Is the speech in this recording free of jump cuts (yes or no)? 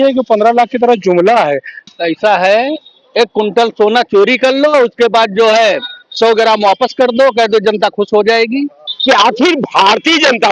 no